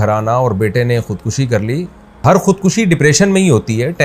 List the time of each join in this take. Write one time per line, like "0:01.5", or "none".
0:02.2